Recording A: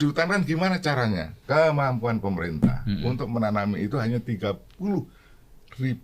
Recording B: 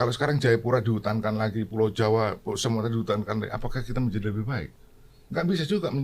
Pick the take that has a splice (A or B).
A